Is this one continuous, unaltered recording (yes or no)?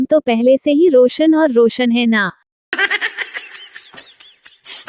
no